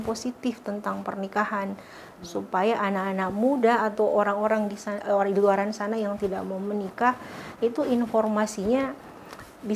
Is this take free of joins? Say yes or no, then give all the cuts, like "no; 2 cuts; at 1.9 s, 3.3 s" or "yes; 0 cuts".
yes; 0 cuts